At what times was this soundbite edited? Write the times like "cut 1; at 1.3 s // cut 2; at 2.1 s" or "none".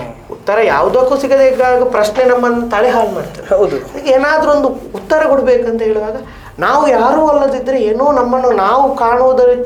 none